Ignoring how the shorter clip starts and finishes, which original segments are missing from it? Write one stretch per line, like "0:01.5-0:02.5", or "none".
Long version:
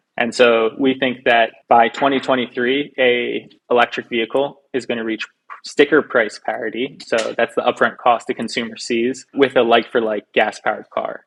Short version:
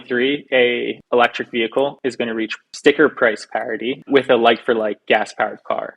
0:03.4-0:03.6
0:04.8-0:05.1
0:06.9-0:09.3